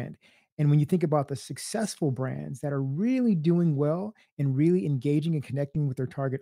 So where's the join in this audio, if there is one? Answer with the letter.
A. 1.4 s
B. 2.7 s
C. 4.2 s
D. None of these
D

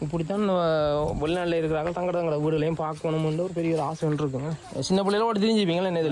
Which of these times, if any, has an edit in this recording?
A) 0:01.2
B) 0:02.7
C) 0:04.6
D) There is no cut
C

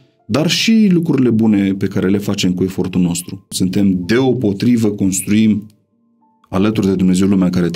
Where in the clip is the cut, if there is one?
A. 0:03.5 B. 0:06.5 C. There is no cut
A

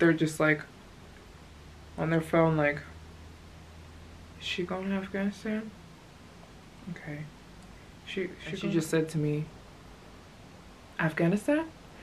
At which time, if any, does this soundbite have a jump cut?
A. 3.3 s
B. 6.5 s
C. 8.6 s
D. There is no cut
C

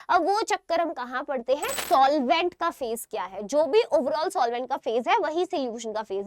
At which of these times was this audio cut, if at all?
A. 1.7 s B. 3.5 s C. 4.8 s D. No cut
A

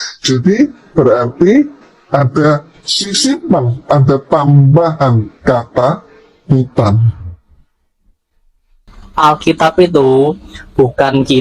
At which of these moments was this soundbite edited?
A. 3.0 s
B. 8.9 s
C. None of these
B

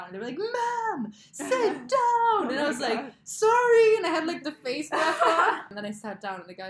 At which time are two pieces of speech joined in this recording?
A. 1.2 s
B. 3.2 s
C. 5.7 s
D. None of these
C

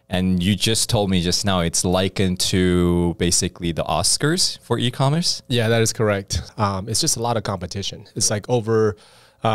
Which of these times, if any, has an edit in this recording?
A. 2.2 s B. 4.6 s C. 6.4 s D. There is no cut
C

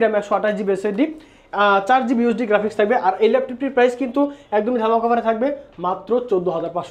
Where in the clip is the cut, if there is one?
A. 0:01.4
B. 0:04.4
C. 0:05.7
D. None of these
D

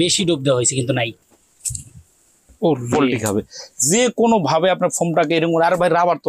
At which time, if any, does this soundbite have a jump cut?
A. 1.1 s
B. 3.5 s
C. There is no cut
A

